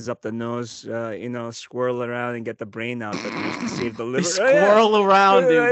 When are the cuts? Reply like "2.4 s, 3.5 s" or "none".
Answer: none